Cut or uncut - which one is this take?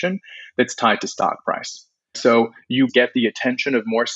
cut